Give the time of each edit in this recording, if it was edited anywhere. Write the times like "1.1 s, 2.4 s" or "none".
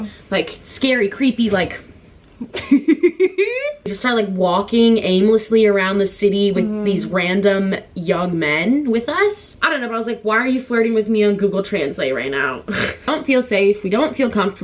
4.0 s, 9.5 s, 13.1 s